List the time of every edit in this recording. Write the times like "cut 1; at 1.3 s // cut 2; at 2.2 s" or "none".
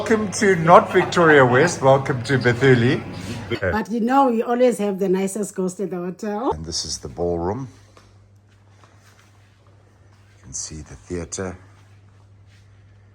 cut 1; at 3.6 s // cut 2; at 6.5 s